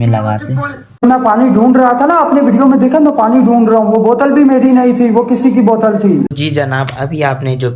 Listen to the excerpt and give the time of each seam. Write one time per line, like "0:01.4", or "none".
0:01.0
0:06.4